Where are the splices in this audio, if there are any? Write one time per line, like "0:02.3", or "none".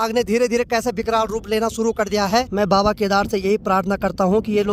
0:02.5